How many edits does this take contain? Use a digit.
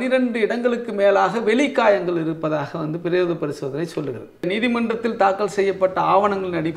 1